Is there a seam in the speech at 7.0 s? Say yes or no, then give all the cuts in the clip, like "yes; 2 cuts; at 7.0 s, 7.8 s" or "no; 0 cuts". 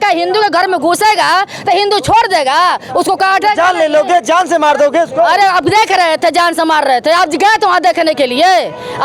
no; 0 cuts